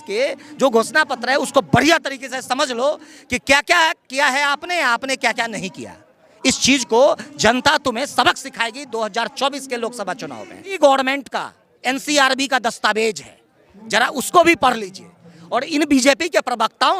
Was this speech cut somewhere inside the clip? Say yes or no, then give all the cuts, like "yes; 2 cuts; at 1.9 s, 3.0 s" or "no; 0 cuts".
yes; 1 cut; at 10.8 s